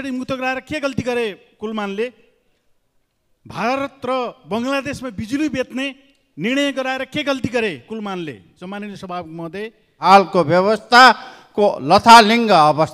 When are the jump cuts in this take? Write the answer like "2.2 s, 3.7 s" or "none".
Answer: 10.0 s